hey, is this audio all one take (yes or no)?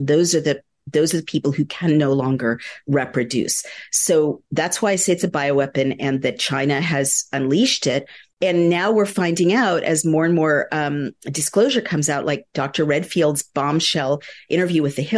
no